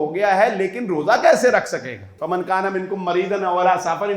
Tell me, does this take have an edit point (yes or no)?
yes